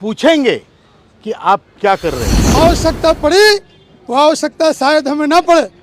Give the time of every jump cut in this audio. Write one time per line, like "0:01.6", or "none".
0:02.4